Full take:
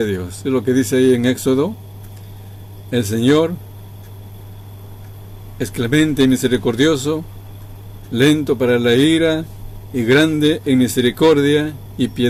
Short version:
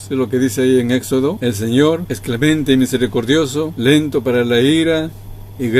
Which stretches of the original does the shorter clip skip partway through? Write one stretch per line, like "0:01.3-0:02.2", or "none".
0:01.7-0:02.9
0:03.6-0:05.6
0:07.2-0:08.1

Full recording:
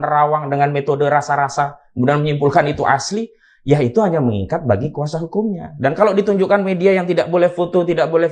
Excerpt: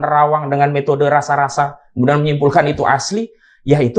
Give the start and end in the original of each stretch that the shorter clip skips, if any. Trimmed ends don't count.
none

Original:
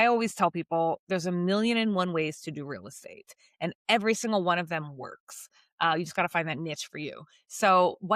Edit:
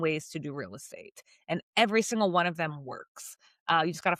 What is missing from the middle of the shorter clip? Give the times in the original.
none

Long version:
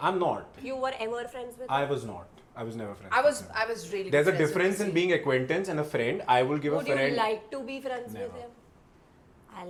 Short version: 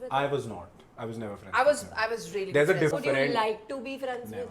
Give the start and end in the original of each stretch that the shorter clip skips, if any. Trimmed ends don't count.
0:04.5-0:06.7

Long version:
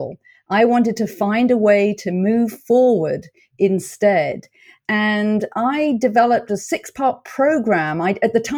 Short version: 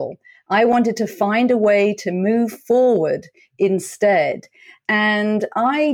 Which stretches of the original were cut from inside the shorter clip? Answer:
none

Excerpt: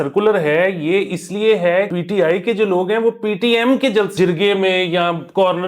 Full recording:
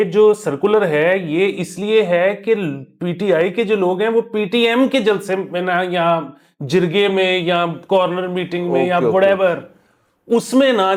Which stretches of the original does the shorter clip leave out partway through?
0:02.4-0:03.0
0:05.2-0:06.7

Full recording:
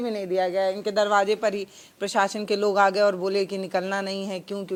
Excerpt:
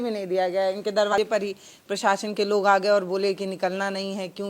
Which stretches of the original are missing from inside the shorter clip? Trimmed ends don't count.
0:01.1-0:01.2

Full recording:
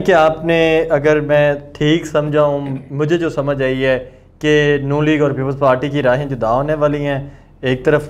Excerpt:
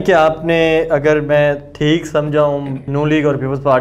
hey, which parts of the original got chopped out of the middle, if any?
0:02.9-0:04.8

